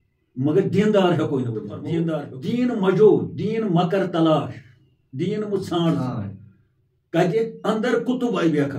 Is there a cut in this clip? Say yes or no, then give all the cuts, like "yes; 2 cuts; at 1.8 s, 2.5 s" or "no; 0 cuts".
yes; 1 cut; at 2.3 s